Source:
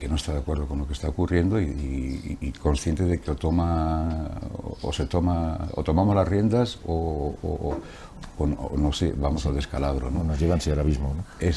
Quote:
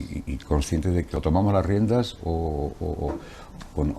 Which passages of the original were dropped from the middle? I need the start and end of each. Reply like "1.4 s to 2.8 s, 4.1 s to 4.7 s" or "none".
3.3 s to 5.8 s